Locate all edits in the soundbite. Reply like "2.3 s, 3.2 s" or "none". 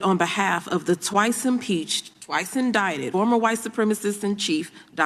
3.1 s